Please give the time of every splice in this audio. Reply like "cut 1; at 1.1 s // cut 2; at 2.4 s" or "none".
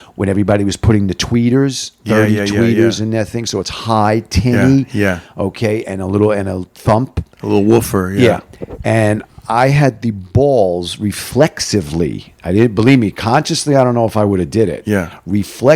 none